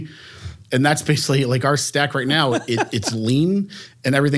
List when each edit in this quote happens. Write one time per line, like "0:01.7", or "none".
none